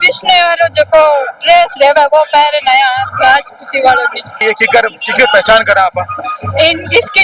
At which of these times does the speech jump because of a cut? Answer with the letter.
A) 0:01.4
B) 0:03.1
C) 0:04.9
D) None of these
D